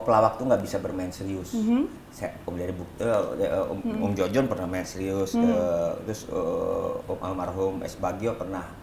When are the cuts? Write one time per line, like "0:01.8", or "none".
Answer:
none